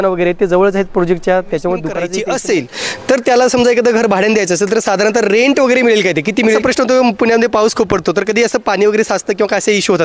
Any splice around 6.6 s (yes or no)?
yes